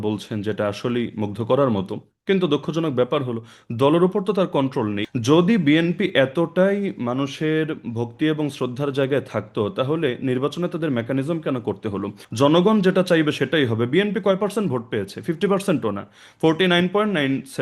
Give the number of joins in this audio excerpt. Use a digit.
2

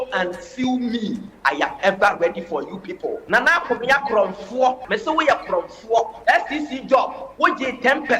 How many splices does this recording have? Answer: 4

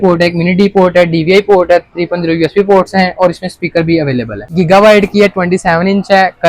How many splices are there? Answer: 1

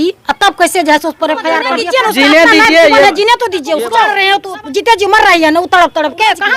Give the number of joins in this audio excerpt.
2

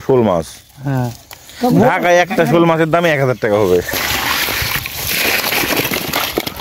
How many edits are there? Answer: 1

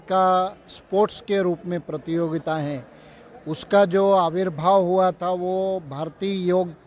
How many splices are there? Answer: 0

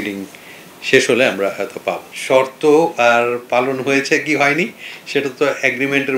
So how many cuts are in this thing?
1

